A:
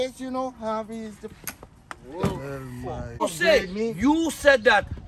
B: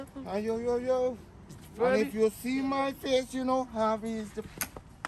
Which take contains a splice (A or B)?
A